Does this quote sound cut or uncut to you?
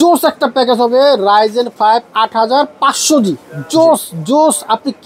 uncut